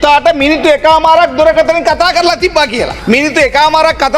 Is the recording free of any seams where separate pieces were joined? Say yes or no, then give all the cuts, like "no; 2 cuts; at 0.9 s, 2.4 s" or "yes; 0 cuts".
no; 1 cut; at 2.9 s